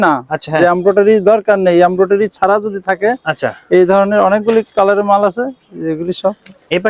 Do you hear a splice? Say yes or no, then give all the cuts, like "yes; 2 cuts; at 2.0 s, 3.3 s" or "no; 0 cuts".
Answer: no; 0 cuts